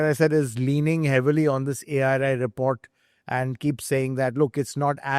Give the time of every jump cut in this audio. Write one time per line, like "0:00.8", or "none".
none